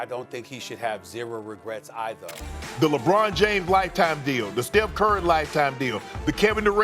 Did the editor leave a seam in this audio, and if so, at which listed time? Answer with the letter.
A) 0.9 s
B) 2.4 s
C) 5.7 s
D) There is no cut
B